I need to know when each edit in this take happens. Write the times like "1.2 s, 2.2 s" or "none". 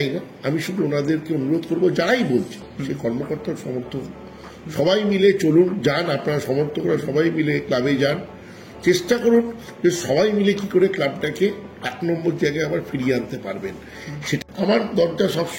14.4 s